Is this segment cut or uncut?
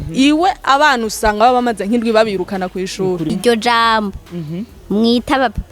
cut